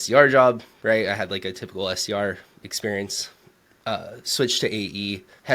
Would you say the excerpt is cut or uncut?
uncut